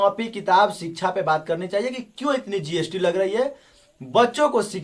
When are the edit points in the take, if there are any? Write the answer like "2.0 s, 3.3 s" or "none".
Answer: none